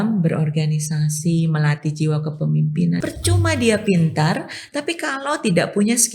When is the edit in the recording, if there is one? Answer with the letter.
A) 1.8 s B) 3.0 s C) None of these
B